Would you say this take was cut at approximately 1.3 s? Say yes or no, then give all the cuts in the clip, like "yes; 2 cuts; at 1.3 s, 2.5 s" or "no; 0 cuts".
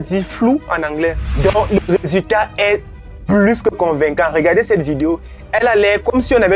yes; 2 cuts; at 1.3 s, 5.3 s